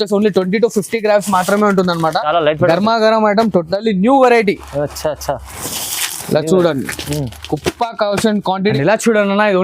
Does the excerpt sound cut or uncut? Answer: cut